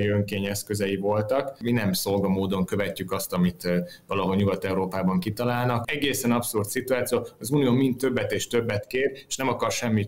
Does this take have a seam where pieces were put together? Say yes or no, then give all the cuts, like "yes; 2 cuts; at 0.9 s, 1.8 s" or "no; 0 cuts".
yes; 2 cuts; at 1.5 s, 5.9 s